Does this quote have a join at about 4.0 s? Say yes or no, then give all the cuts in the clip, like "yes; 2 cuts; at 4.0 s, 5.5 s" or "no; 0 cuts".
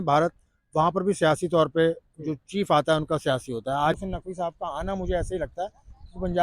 yes; 1 cut; at 4.0 s